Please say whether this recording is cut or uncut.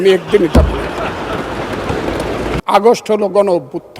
cut